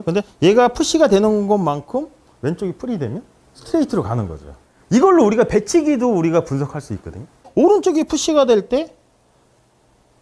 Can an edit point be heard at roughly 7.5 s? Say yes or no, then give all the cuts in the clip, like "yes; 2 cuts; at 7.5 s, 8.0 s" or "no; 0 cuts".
yes; 1 cut; at 7.5 s